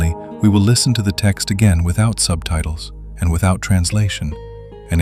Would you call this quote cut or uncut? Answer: uncut